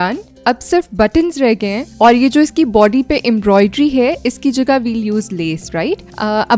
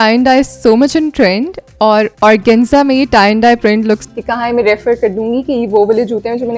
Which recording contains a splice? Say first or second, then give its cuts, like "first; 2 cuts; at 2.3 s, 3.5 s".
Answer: second; 1 cut; at 4.0 s